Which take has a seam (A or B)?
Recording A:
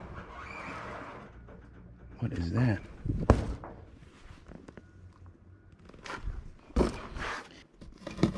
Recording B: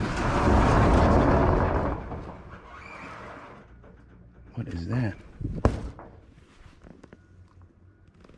A